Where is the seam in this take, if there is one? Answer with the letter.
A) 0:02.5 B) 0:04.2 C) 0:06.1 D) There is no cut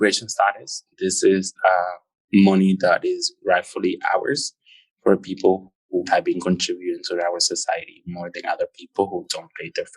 C